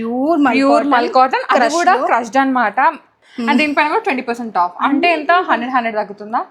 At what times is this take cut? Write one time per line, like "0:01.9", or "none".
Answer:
0:03.2